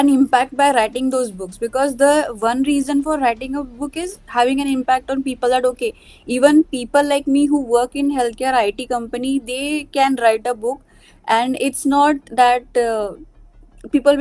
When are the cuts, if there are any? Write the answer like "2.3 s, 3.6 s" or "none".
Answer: none

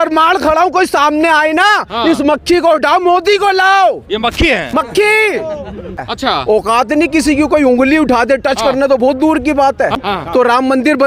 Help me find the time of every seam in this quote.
6.1 s, 10.0 s

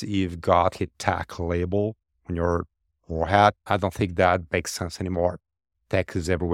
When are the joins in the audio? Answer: 3.7 s

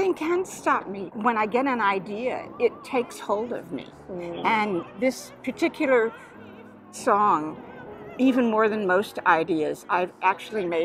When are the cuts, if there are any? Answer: 1.0 s, 6.9 s

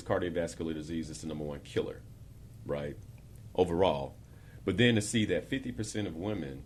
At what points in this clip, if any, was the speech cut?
none

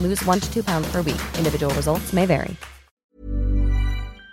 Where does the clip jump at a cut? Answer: 3.1 s

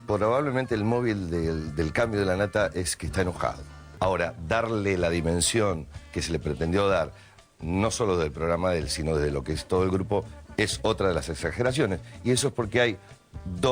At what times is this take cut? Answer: 3.9 s

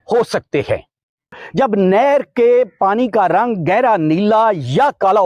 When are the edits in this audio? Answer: 1.4 s

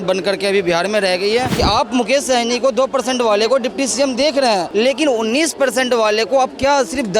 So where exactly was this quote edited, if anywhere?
1.5 s, 4.7 s

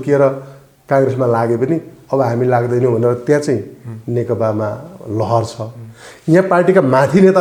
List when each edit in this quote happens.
none

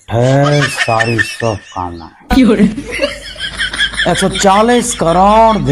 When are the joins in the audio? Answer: none

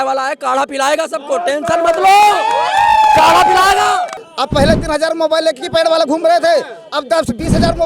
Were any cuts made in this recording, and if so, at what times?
4.2 s

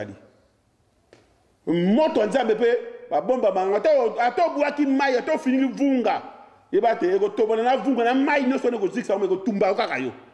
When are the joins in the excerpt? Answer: none

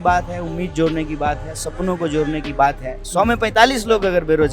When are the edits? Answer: 3.0 s

